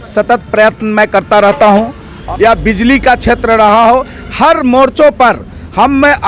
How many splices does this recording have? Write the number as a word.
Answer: one